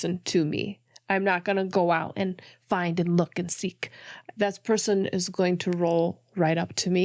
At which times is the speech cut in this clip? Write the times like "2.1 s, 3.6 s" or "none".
none